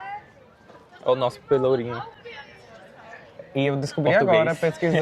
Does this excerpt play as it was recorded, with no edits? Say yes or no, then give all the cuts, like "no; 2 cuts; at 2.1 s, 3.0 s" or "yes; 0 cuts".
yes; 0 cuts